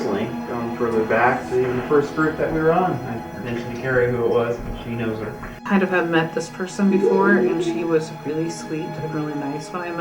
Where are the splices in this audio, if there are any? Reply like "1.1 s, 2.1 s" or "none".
5.6 s